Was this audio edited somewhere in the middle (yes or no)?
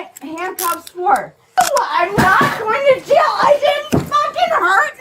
yes